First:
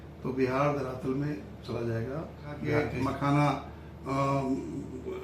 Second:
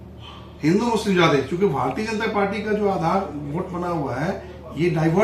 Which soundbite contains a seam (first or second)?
first